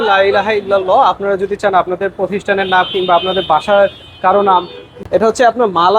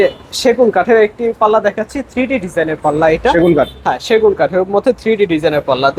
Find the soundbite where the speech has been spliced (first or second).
first